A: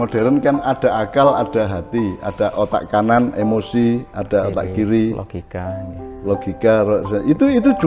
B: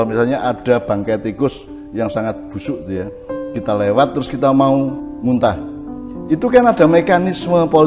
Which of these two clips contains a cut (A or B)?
B